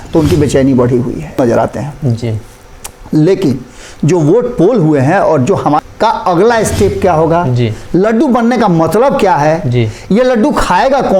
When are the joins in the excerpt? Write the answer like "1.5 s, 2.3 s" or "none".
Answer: 1.3 s, 5.8 s